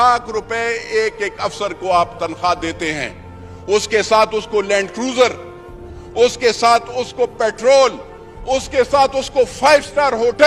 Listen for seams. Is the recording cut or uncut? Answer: uncut